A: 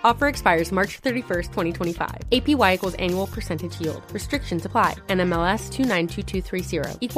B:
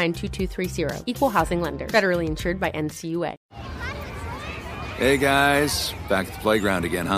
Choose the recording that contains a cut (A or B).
B